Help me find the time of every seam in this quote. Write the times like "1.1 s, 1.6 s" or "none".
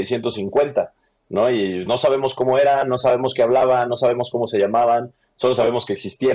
none